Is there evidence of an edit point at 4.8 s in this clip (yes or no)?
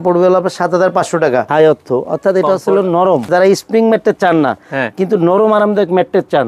no